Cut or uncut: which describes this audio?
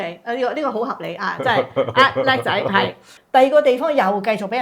cut